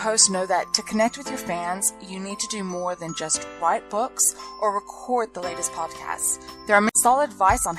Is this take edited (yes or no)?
yes